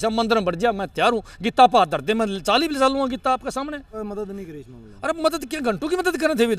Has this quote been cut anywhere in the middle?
yes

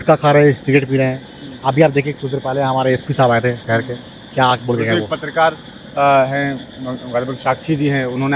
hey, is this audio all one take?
yes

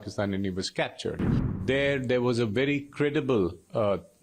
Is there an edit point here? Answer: yes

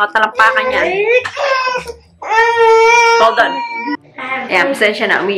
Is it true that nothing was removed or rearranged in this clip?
yes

